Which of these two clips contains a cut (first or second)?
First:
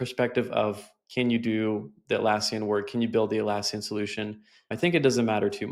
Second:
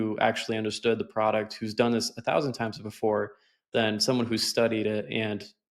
first